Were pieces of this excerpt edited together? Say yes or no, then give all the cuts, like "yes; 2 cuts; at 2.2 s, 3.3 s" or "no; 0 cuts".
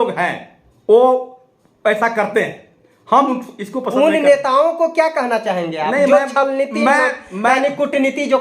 no; 0 cuts